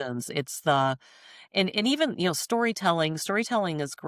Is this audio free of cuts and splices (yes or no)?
yes